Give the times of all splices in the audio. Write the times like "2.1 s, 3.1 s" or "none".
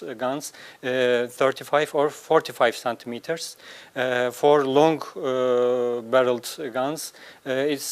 6.8 s